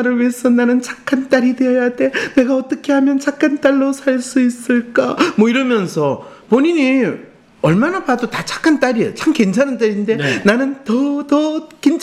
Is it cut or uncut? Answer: uncut